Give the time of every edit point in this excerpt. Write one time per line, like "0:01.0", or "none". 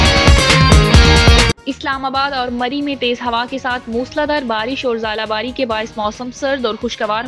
0:01.5